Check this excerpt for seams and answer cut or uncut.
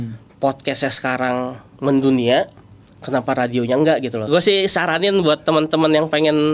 cut